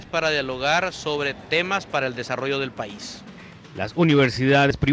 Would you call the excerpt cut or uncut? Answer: uncut